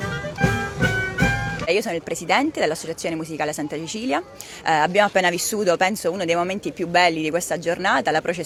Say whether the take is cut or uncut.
uncut